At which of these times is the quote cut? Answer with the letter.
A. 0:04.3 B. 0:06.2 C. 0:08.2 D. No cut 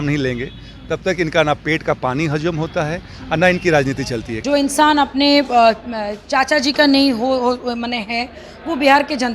A